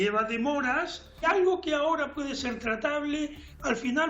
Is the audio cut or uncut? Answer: cut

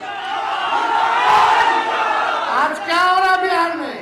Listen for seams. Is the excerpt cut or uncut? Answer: uncut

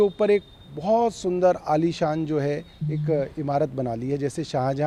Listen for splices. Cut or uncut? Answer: uncut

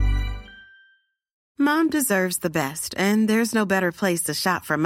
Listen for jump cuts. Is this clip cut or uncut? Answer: cut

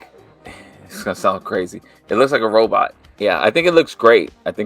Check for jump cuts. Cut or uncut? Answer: cut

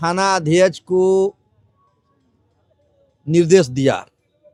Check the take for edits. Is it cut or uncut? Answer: uncut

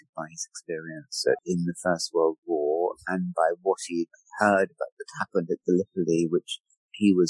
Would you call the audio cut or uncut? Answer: cut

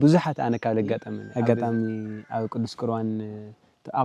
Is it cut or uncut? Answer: cut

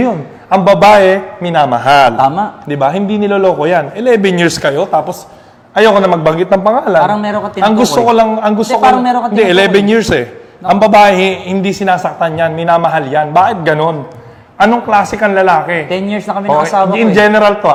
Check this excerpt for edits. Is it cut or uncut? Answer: uncut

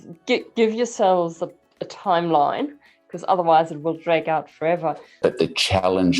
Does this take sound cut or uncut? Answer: cut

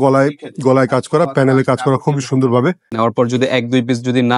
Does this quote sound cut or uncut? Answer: cut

